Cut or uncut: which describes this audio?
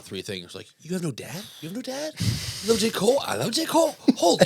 uncut